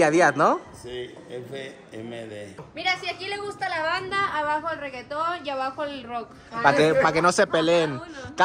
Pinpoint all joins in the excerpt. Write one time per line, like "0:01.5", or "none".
0:02.5

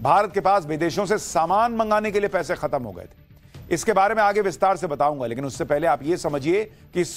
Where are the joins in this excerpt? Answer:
0:01.1

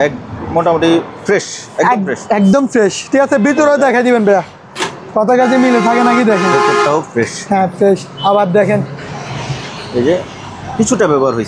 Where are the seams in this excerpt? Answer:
none

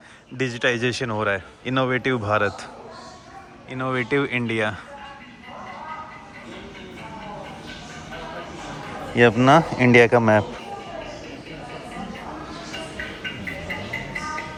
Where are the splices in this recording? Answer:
none

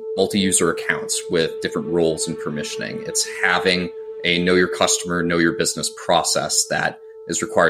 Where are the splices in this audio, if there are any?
none

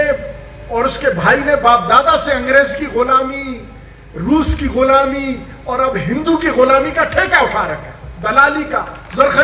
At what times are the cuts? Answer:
none

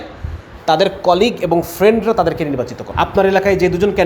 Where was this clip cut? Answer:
0:02.8

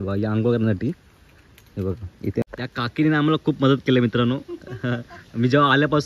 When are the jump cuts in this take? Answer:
0:02.4

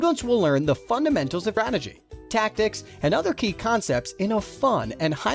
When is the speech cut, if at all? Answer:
0:01.6

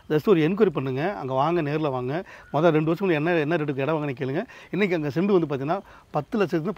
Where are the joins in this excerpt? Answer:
none

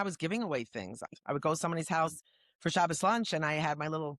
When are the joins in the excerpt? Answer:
0:01.0

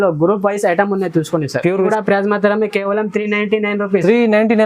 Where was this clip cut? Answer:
0:01.9

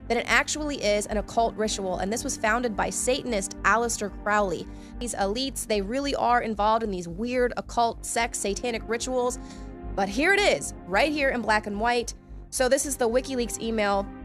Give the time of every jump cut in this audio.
0:03.0

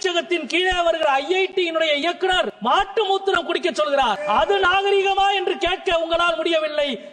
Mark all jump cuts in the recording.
0:02.5
0:04.2

